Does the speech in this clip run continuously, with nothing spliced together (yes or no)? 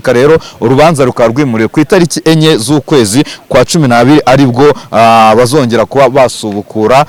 yes